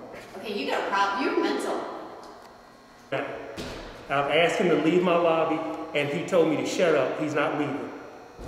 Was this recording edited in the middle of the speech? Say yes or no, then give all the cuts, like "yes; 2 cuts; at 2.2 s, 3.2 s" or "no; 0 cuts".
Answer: yes; 1 cut; at 3.1 s